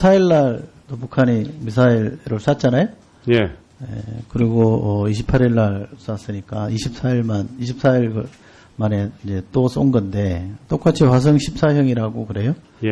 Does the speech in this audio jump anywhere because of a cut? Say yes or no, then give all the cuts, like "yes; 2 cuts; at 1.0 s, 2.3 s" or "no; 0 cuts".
no; 0 cuts